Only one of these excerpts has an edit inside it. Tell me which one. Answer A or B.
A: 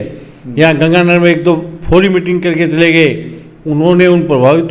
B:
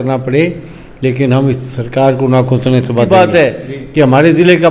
B